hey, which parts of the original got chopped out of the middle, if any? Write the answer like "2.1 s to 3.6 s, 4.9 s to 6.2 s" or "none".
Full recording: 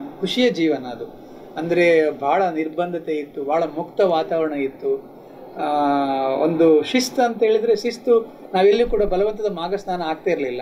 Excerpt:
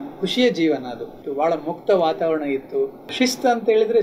1.2 s to 3.3 s, 5.2 s to 6.9 s